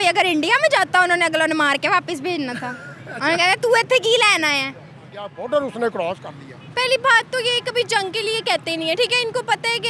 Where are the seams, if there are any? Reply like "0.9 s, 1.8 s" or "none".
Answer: 5.4 s